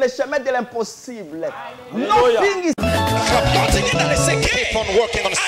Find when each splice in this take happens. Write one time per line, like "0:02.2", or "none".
0:04.5